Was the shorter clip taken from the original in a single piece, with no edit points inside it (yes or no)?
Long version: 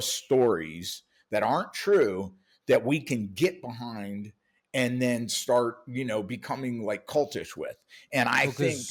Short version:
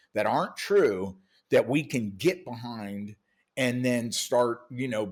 yes